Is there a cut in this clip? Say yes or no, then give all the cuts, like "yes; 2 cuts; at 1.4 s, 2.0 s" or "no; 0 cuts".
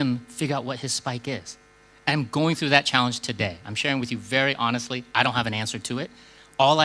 no; 0 cuts